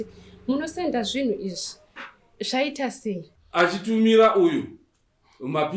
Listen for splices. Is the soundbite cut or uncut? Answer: cut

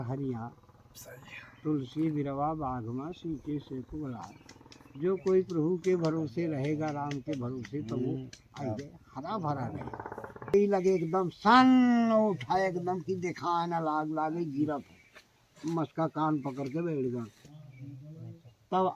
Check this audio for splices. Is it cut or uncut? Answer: cut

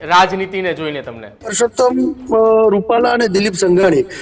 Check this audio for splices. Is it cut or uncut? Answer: cut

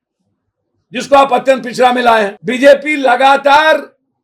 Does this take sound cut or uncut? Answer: cut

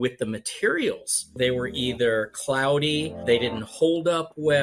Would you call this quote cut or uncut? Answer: cut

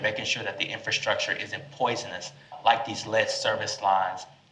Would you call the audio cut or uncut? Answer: cut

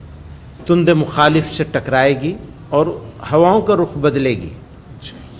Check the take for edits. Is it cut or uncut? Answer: cut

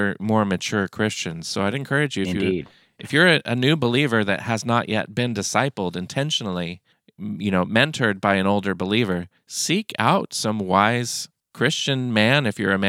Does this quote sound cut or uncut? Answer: uncut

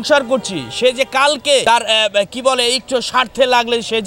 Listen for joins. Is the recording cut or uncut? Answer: cut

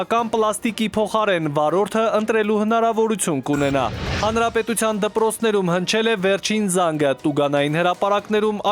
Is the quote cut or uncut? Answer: cut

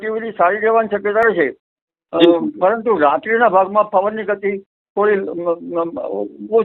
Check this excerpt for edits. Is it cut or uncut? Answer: uncut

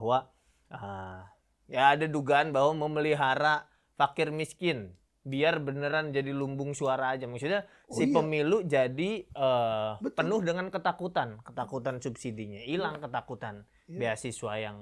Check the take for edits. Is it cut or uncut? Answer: uncut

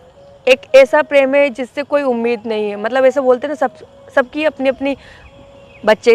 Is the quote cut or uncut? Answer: uncut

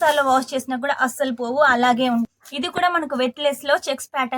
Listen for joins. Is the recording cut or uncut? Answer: cut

